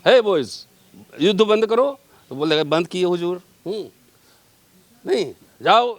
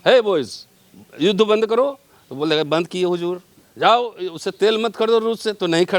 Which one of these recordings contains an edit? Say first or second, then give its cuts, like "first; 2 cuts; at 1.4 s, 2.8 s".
second; 1 cut; at 3.6 s